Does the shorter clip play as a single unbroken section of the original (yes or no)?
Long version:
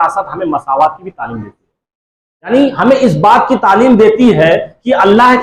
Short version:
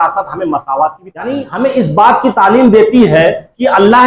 no